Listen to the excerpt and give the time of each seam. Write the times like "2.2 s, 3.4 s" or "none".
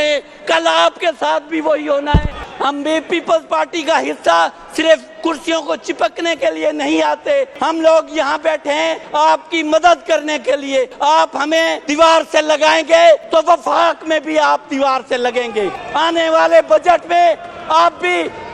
2.4 s, 7.5 s, 9.0 s, 10.9 s, 11.8 s, 13.2 s, 15.8 s